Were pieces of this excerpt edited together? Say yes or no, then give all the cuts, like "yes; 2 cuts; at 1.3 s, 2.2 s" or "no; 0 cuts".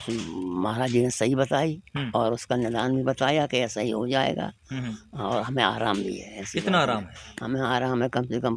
no; 0 cuts